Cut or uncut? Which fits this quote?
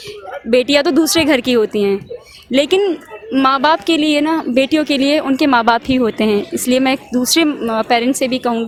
uncut